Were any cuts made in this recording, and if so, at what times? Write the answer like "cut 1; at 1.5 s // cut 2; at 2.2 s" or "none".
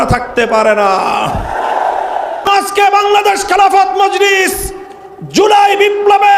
cut 1; at 2.4 s